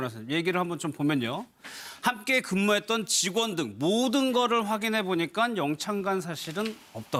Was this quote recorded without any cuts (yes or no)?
yes